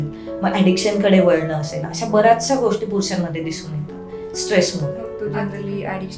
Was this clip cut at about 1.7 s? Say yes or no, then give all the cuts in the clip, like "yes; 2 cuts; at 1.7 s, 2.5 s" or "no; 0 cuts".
no; 1 cut; at 5.1 s